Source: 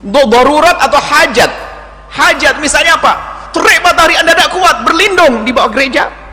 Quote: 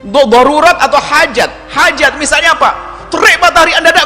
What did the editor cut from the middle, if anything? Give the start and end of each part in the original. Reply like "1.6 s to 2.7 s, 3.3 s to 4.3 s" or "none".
1.6 s to 2.0 s